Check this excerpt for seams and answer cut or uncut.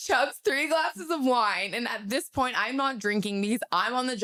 uncut